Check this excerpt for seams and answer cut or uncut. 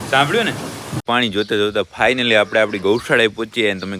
cut